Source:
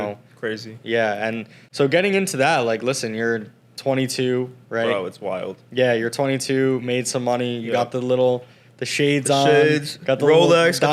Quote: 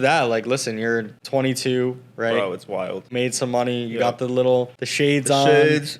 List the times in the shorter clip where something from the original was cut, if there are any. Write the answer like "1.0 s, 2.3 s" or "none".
1.2 s, 3.1 s, 4.8 s